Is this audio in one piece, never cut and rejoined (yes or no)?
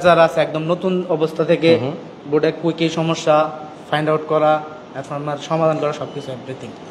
yes